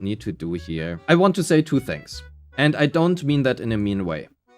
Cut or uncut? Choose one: cut